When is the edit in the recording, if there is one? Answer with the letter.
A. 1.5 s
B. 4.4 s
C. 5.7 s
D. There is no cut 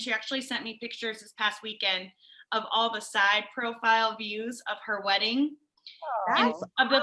D